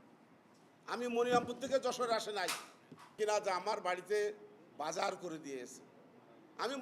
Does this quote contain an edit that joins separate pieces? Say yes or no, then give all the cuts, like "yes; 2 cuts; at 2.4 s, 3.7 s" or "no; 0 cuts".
yes; 1 cut; at 3.2 s